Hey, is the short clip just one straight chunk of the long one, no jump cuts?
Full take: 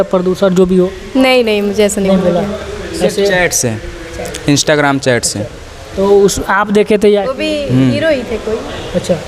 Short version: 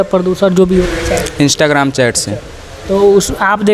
no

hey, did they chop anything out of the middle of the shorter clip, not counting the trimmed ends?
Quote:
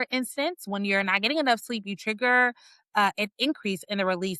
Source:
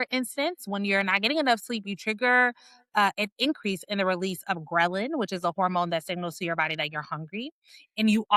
no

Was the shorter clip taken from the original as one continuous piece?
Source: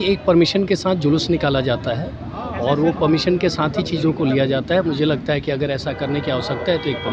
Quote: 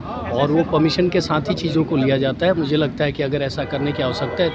yes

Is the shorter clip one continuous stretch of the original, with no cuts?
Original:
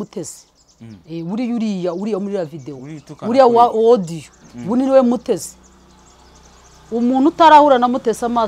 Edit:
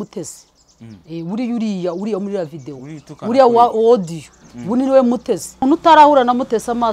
no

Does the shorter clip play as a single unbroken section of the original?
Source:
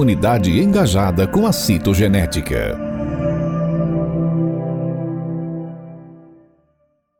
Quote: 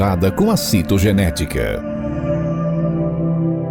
yes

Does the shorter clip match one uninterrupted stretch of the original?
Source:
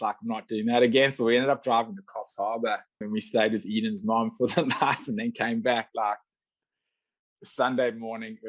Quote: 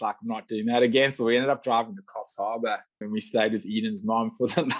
yes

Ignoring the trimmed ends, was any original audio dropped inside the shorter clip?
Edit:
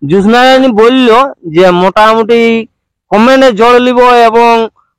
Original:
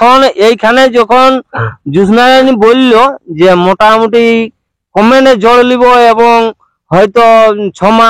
no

